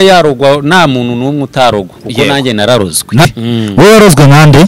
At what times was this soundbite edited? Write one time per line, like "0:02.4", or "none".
0:03.2